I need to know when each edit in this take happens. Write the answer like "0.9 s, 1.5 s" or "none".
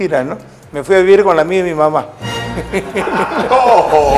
none